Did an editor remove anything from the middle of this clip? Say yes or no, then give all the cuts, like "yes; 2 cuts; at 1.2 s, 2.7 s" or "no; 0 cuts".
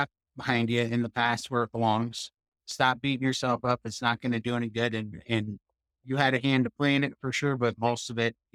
no; 0 cuts